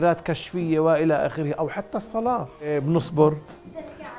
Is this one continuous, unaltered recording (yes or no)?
no